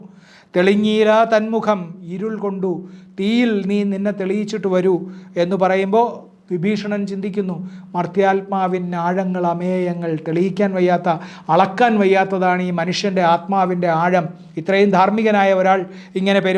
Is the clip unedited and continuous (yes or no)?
yes